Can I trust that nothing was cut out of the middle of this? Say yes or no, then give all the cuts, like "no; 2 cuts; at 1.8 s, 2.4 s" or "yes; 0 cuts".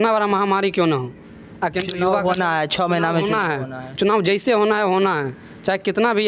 yes; 0 cuts